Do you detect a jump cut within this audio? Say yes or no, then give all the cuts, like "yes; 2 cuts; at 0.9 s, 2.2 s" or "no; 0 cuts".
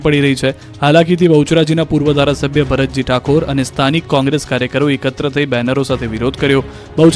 no; 0 cuts